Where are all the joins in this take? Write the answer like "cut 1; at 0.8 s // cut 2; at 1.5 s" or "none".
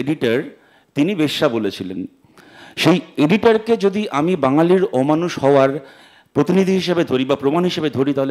none